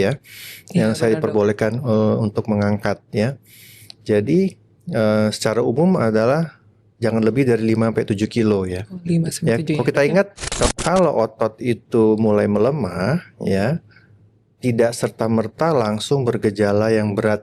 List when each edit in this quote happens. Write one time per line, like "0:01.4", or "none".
0:10.7